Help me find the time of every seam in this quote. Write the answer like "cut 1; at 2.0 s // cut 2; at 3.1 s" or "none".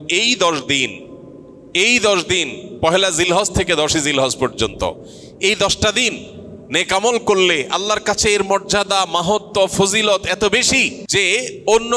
cut 1; at 11.0 s